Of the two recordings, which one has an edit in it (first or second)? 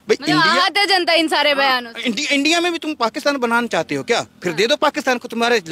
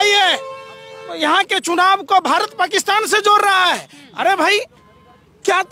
second